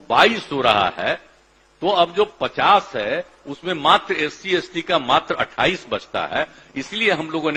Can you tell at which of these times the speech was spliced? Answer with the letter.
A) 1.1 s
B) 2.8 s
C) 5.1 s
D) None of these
D